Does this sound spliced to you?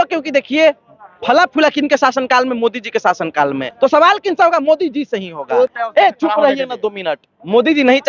yes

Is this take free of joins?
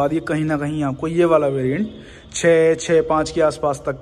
yes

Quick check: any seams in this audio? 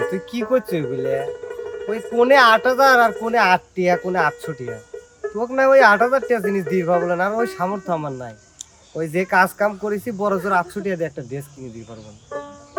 no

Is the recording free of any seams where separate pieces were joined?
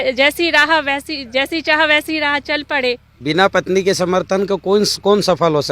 no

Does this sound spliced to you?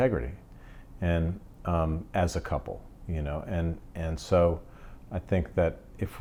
no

